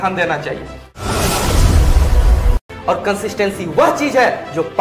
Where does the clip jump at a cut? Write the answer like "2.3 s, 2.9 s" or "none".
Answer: 1.0 s, 2.6 s